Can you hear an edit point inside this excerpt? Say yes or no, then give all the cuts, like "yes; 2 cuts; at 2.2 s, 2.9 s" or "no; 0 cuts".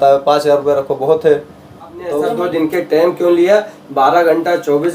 yes; 1 cut; at 2.2 s